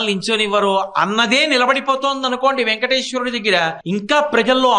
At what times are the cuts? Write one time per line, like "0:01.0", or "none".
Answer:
0:03.8

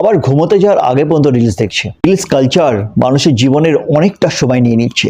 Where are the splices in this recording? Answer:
0:01.8

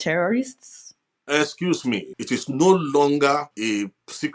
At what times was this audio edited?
0:02.1
0:03.5

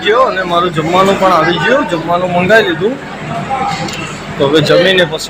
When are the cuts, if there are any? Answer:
none

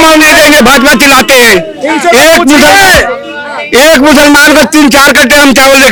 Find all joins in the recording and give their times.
none

